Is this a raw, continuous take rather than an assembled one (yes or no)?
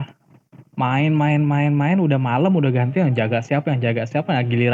yes